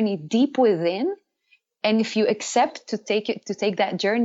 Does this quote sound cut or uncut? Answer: uncut